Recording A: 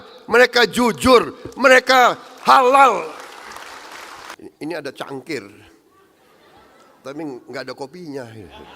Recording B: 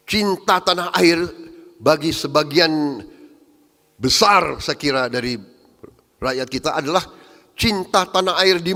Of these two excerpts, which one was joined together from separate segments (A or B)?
A